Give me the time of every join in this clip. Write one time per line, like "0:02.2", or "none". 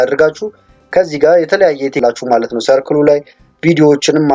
0:02.0